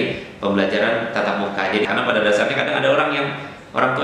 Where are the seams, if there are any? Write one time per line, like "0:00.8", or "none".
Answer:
0:01.9